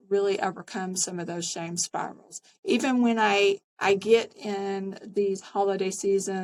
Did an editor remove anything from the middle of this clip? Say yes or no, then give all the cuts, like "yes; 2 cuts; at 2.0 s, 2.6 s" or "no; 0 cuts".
no; 0 cuts